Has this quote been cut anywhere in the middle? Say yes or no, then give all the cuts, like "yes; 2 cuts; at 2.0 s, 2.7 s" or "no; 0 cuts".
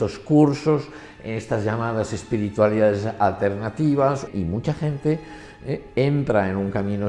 yes; 1 cut; at 4.3 s